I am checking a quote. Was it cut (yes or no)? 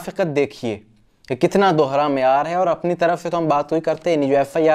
no